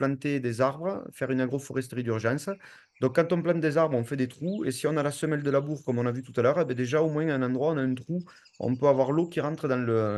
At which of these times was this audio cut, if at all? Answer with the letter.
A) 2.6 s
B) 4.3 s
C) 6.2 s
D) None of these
D